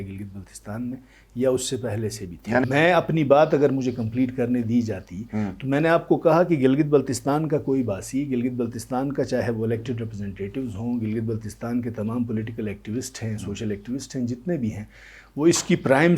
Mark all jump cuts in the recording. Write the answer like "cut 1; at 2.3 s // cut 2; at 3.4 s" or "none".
cut 1; at 2.6 s